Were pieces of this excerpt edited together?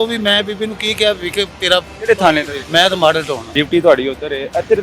yes; 2 cuts; at 2.6 s, 3.5 s

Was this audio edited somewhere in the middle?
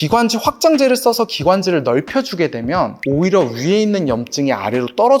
no; 0 cuts

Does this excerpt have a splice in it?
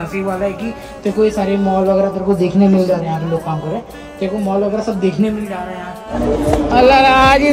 yes; 1 cut; at 6.0 s

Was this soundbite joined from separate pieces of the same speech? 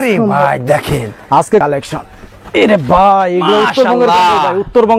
yes; 1 cut; at 1.6 s

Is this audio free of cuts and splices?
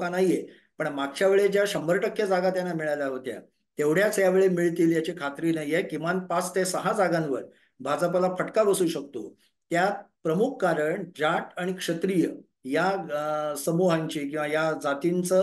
yes; 0 cuts

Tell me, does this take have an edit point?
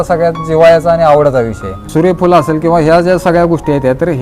yes; 1 cut; at 1.8 s

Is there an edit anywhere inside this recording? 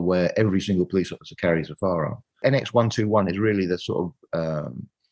yes; 1 cut; at 2.4 s

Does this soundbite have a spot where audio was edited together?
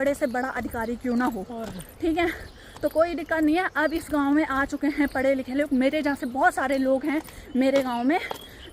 no; 0 cuts

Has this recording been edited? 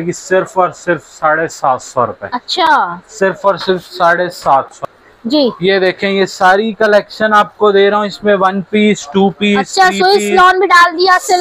no; 0 cuts

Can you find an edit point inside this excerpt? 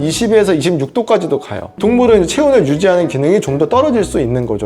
no; 0 cuts

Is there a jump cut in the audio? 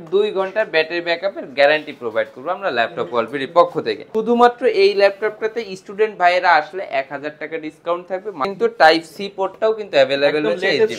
yes; 2 cuts; at 4.0 s, 8.5 s

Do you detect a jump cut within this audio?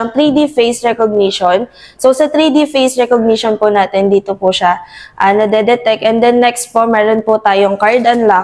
no; 0 cuts

